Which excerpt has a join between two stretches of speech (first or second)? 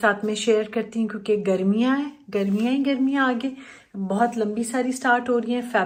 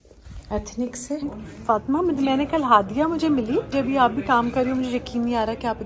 second